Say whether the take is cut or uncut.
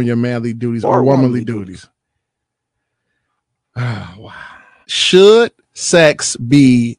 cut